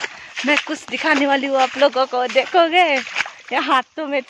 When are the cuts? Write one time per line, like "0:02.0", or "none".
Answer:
none